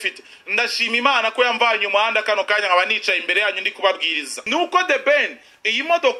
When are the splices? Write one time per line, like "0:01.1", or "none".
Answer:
0:04.4